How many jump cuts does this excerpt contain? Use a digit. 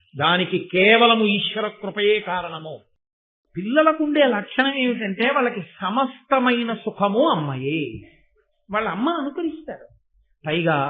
1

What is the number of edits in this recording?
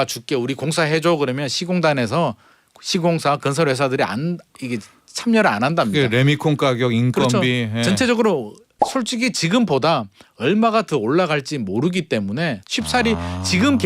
1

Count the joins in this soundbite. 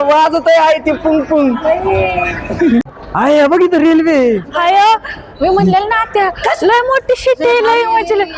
1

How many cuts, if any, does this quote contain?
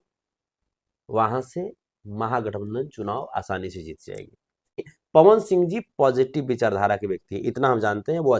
1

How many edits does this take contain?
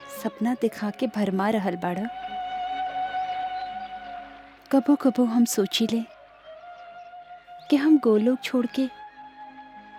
0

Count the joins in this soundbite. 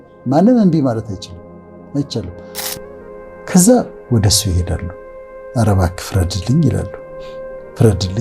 1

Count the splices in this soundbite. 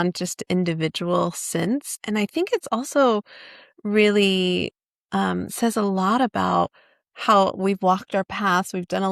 1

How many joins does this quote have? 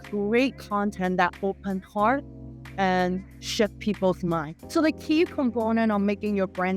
1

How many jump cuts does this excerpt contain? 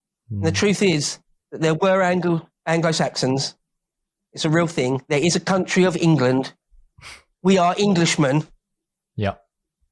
0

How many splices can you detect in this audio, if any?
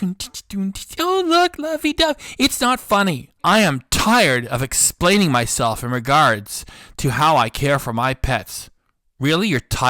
1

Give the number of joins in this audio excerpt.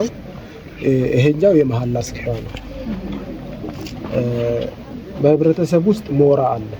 0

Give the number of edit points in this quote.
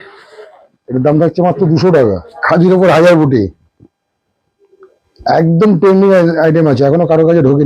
1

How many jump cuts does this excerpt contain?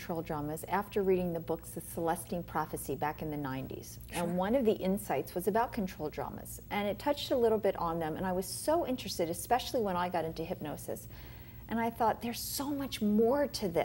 1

